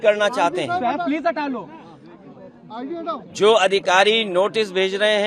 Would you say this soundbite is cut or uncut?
uncut